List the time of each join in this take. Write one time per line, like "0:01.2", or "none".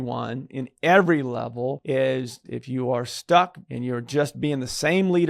0:01.8
0:02.5
0:03.7